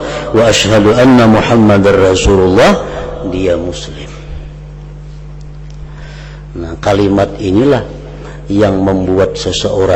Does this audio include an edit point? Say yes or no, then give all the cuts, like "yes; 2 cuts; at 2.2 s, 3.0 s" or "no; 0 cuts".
no; 0 cuts